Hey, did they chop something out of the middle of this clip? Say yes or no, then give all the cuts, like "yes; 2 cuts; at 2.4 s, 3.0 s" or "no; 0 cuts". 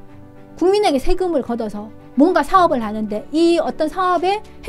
no; 0 cuts